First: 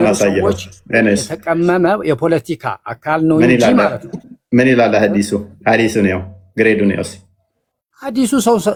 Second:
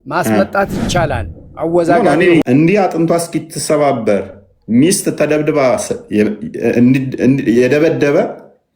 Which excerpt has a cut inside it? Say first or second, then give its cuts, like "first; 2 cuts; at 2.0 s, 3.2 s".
second; 1 cut; at 2.4 s